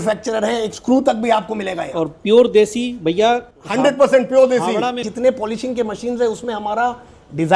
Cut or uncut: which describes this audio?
cut